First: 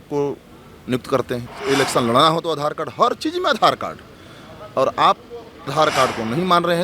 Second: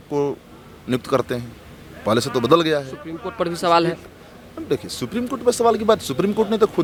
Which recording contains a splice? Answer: first; 2 cuts; at 1.5 s, 5.7 s

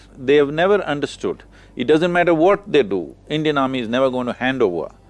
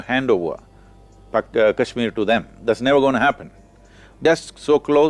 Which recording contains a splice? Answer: second; 1 cut; at 4.1 s

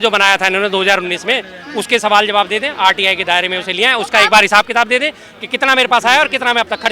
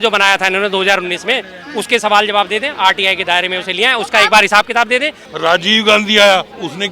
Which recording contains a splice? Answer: second; 1 cut; at 5.3 s

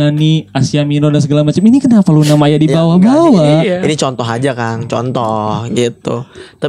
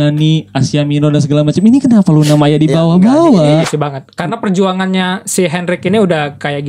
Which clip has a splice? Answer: second; 1 cut; at 3.7 s

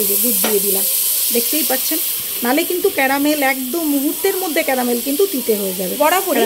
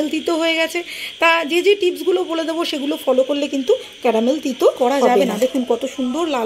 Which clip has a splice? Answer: second; 1 cut; at 4.8 s

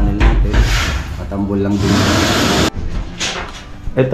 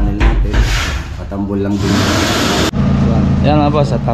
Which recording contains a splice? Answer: first; 1 cut; at 2.7 s

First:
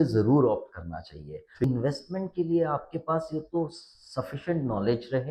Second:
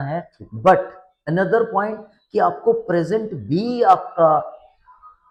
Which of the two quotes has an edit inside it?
first; 1 cut; at 1.7 s

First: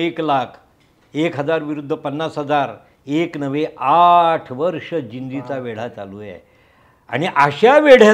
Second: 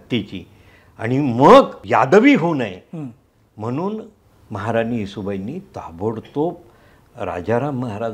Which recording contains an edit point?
second; 1 cut; at 1.8 s

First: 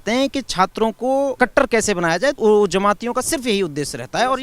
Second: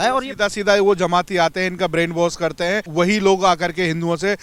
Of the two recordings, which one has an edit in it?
first; 2 cuts; at 1.3 s, 2.4 s

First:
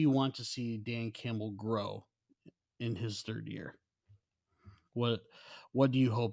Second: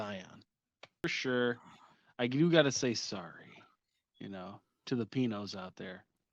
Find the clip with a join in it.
second; 1 cut; at 1.0 s

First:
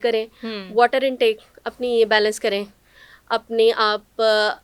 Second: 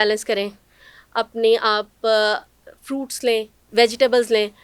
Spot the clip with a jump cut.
second; 1 cut; at 3.6 s

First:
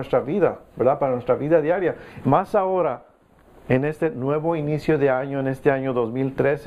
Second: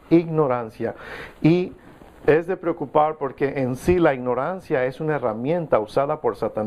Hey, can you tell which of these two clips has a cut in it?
second; 1 cut; at 1.7 s

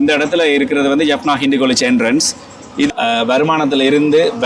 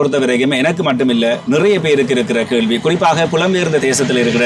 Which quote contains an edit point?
first; 1 cut; at 2.9 s

